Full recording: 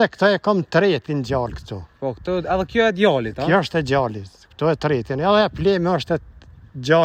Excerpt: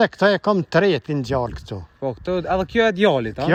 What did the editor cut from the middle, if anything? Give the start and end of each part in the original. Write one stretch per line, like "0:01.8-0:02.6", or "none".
none